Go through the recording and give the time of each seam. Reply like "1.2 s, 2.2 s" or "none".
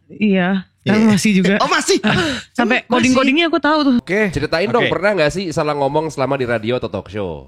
4.0 s